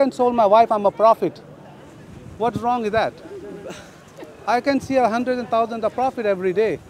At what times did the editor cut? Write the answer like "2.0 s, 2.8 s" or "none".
none